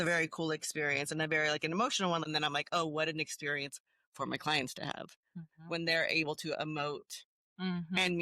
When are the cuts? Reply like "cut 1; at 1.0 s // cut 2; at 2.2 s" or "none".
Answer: cut 1; at 2.3 s